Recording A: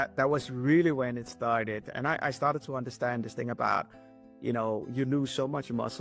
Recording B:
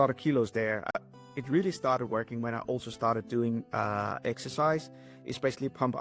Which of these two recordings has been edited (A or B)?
B